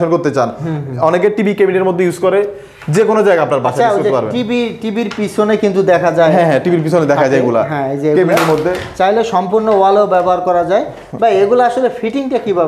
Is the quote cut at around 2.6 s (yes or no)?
no